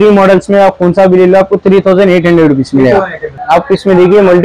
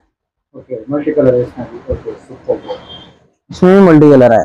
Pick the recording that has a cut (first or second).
first